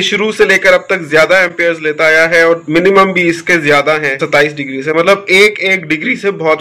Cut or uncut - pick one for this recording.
uncut